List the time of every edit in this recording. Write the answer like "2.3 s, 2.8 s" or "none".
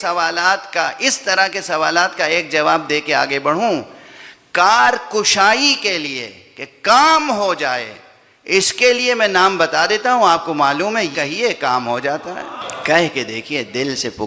11.1 s, 12.6 s